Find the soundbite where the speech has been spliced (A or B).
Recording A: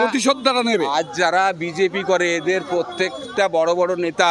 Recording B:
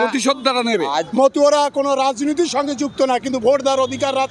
B